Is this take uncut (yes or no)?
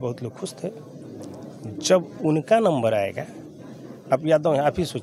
yes